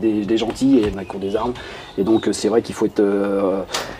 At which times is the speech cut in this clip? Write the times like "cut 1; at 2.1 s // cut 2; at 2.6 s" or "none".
cut 1; at 1.0 s